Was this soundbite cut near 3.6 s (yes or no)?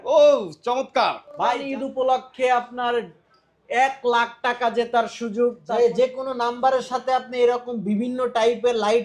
no